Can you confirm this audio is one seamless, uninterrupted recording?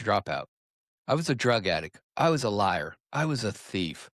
yes; 0 cuts

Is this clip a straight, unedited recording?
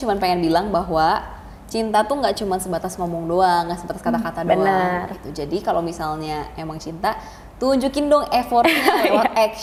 yes; 0 cuts

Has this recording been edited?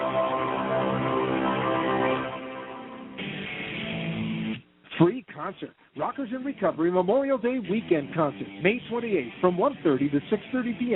yes; 1 cut; at 3.0 s

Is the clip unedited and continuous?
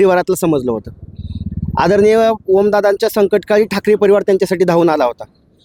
yes; 0 cuts

